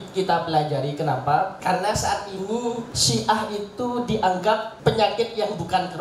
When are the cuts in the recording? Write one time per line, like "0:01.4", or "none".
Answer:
0:01.6
0:02.9
0:04.7